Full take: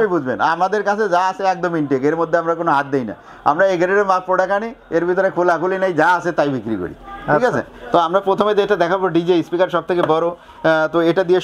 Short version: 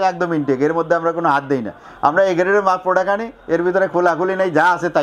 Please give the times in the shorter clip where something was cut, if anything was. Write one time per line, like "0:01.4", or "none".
none